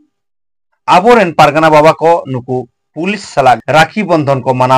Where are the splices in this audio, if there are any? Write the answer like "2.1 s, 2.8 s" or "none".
3.6 s